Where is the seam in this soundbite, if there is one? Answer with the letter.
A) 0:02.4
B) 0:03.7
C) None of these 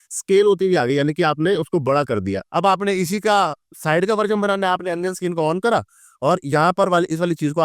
A